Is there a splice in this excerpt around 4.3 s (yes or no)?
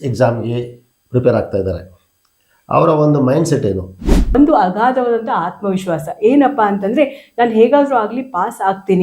yes